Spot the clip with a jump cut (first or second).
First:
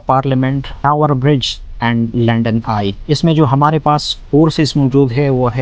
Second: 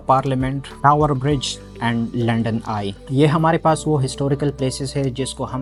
first